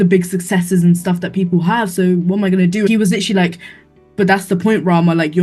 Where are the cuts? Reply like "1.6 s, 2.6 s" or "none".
2.9 s